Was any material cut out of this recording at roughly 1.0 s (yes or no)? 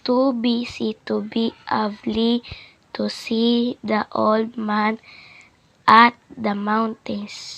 yes